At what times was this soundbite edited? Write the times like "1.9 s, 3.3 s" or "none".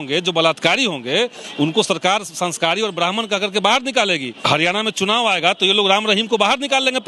4.4 s